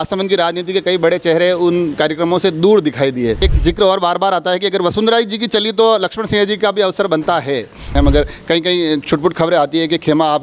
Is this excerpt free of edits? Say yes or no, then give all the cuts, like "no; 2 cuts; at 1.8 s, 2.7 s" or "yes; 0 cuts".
no; 2 cuts; at 3.4 s, 7.9 s